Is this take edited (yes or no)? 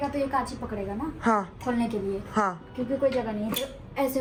no